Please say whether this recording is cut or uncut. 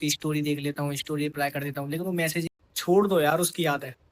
cut